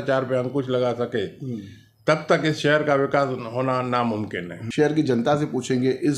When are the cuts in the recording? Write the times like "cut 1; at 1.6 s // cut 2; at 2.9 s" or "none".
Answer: cut 1; at 4.6 s